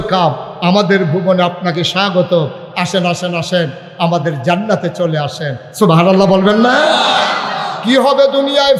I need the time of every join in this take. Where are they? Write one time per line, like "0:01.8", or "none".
none